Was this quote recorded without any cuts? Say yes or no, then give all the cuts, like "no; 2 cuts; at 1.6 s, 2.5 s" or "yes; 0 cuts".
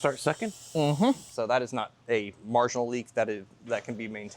no; 1 cut; at 1.3 s